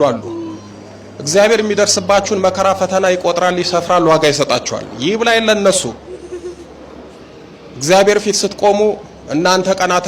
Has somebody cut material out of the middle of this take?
no; 0 cuts

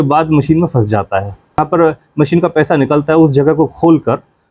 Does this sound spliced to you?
yes; 1 cut; at 1.6 s

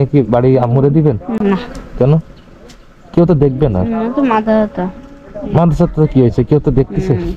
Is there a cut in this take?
yes; 1 cut; at 1.3 s

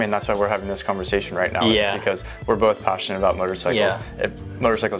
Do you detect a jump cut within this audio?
no; 0 cuts

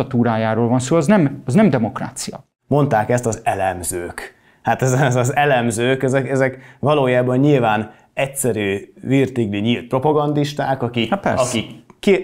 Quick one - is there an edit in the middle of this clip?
yes; 1 cut; at 2.5 s

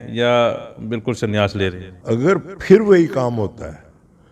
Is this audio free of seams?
no; 1 cut; at 1.9 s

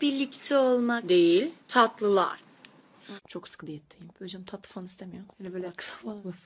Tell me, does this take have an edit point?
no; 0 cuts

